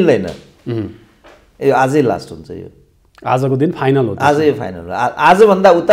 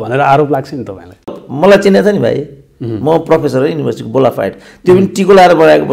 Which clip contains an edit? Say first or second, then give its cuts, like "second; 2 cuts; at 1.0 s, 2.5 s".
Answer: second; 1 cut; at 1.3 s